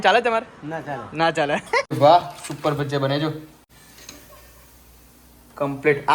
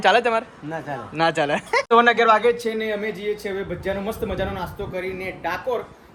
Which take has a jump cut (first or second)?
first